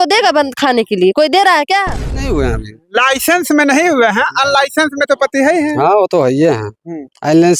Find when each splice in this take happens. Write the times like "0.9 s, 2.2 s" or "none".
2.2 s